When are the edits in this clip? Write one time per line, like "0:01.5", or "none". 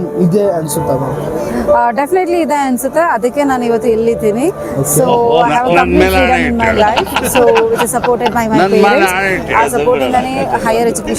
none